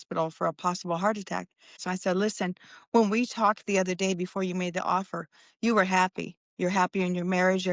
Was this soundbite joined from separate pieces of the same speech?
yes; 1 cut; at 1.9 s

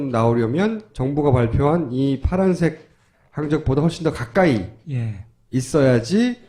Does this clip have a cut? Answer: yes; 1 cut; at 2.7 s

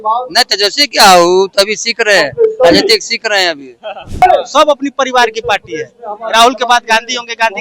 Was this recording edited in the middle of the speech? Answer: yes; 1 cut; at 4.2 s

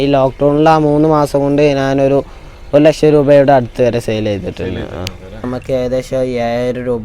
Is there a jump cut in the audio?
yes; 1 cut; at 5.4 s

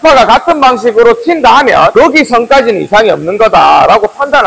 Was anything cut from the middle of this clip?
yes; 1 cut; at 1.9 s

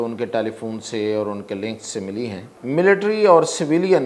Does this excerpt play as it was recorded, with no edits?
no; 1 cut; at 2.5 s

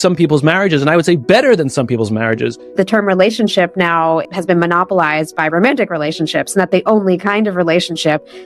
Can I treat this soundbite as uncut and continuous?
no; 2 cuts; at 2.8 s, 4.3 s

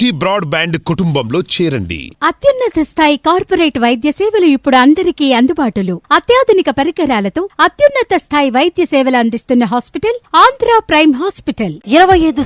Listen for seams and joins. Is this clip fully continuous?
yes; 0 cuts

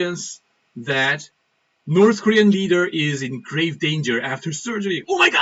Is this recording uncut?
yes; 0 cuts

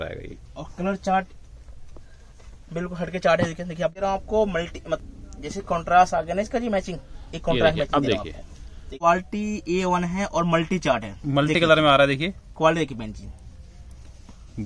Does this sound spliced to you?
yes; 2 cuts; at 3.9 s, 8.8 s

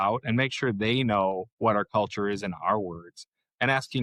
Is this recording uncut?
yes; 0 cuts

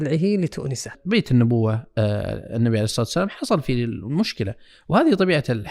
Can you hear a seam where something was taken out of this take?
yes; 1 cut; at 1.0 s

